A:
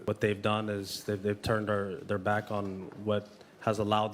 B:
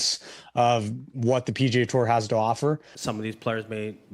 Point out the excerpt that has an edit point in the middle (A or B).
B